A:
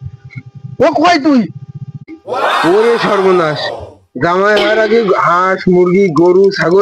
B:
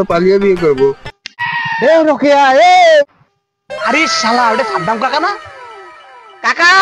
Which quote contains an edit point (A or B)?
B